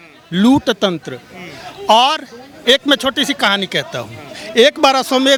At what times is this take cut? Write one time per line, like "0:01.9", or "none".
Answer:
none